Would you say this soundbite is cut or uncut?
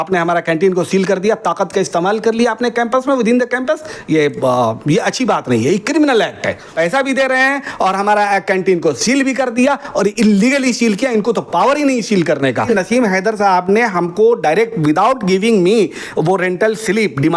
cut